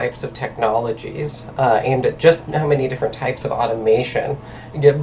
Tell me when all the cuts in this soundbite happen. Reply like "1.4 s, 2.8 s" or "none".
none